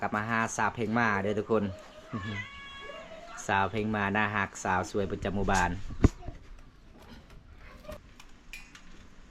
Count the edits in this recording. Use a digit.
1